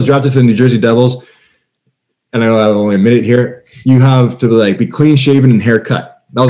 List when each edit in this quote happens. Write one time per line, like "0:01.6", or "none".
none